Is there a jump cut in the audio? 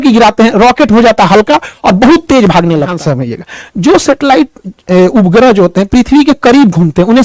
yes; 1 cut; at 3.0 s

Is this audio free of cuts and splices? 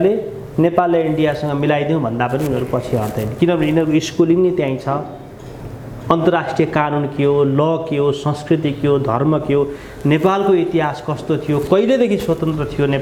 yes; 0 cuts

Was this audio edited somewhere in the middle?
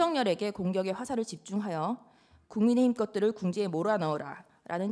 no; 0 cuts

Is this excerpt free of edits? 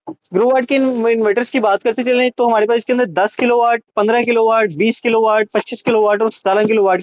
yes; 0 cuts

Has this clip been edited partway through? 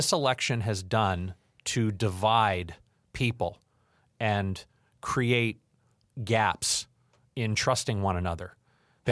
no; 0 cuts

